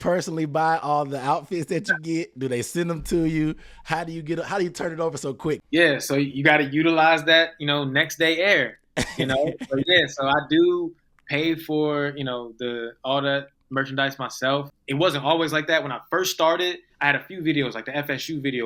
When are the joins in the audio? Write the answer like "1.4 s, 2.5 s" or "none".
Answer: 5.6 s, 14.8 s, 16.9 s